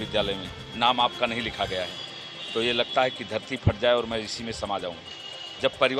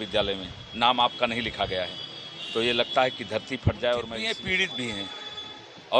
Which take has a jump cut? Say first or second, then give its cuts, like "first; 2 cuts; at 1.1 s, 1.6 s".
second; 1 cut; at 4.2 s